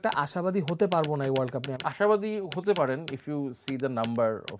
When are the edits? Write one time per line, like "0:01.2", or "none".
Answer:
0:01.7

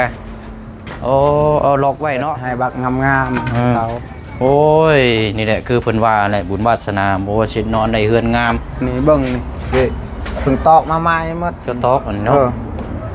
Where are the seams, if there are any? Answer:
0:02.4

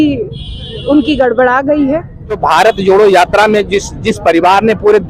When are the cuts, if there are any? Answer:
0:02.4

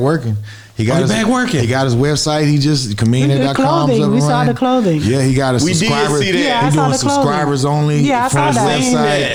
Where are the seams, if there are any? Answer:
none

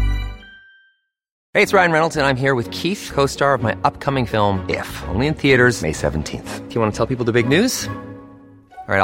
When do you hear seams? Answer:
0:01.3

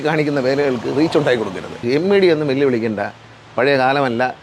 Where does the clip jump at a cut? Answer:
0:01.8

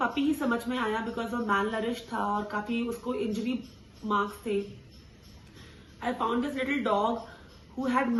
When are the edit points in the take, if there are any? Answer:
none

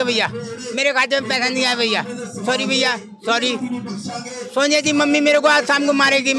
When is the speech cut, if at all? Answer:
none

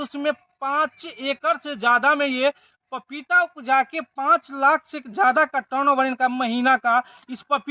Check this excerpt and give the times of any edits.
none

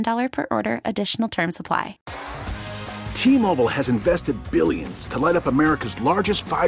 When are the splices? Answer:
0:02.0

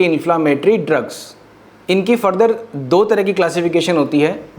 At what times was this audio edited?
none

